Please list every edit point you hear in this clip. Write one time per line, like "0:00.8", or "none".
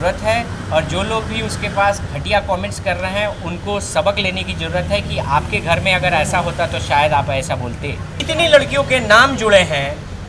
0:08.2